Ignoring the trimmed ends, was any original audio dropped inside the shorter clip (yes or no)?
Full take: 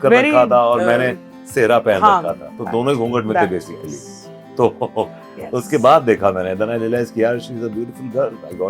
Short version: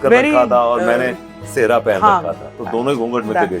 no